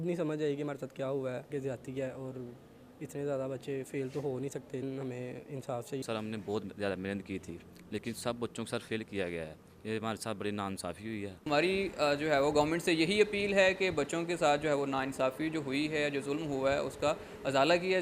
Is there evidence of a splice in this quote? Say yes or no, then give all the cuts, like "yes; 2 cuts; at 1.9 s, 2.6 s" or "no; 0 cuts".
yes; 4 cuts; at 1.5 s, 4.8 s, 6.0 s, 11.5 s